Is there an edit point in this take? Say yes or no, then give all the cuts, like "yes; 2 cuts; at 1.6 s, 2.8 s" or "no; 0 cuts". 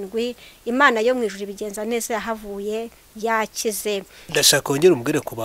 yes; 1 cut; at 4.2 s